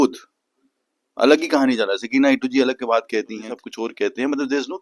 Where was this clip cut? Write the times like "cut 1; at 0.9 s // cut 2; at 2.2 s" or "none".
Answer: cut 1; at 3.5 s